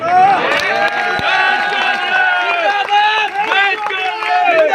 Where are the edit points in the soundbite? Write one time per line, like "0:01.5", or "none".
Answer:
none